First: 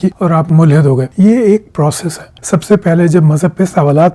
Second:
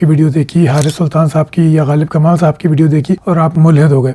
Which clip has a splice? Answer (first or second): first